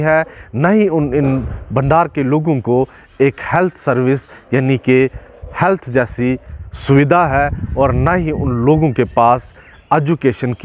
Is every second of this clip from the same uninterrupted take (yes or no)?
yes